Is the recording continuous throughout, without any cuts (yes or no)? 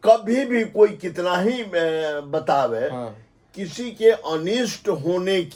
yes